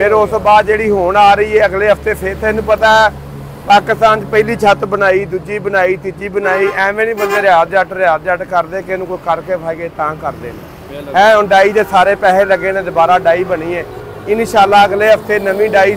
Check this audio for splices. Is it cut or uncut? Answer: uncut